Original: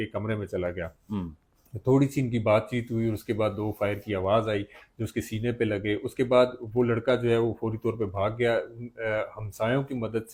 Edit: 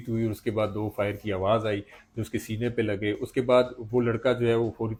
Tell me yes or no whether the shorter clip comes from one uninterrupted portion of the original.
yes